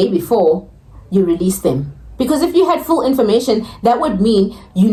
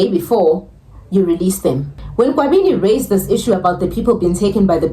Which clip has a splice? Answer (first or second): second